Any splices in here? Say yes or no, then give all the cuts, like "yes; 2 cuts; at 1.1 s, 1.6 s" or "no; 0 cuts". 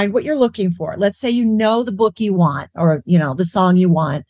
no; 0 cuts